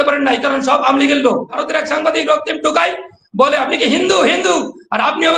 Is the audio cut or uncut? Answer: cut